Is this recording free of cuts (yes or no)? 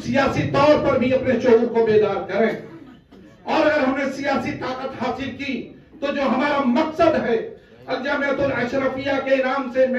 yes